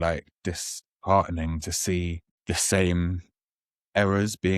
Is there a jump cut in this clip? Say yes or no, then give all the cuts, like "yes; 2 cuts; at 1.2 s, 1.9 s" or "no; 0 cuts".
yes; 1 cut; at 2.3 s